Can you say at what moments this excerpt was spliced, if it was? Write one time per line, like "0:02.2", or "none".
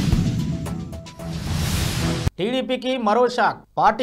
0:02.3